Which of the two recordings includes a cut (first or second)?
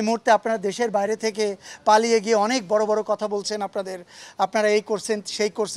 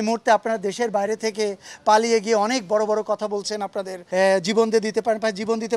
second